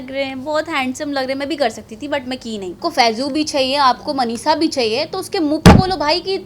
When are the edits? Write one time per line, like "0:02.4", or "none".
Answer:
0:02.8